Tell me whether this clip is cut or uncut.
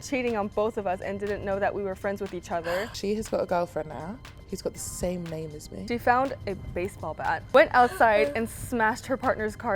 cut